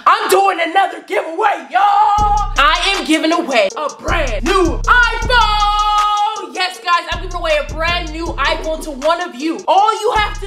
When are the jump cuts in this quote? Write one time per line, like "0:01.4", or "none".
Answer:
0:02.6